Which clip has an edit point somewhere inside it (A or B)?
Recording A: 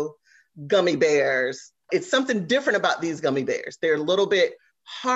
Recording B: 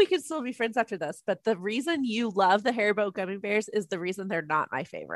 A